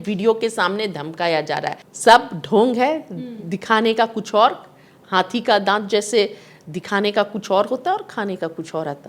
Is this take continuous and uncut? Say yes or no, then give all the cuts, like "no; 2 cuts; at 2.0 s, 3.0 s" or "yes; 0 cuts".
no; 1 cut; at 1.9 s